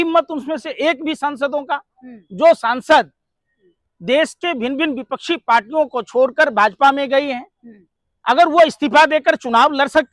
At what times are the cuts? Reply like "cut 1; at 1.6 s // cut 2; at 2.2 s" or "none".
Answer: none